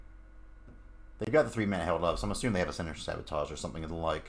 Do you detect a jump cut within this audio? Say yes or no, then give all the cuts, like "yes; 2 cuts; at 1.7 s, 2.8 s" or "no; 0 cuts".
no; 0 cuts